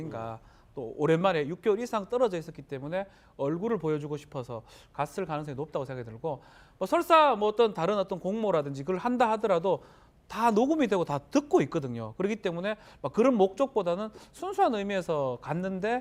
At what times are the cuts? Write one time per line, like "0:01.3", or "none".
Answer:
none